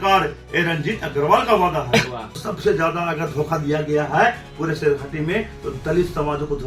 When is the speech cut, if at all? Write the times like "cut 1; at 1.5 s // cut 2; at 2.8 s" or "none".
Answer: cut 1; at 2.4 s